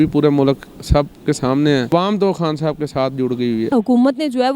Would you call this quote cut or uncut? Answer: cut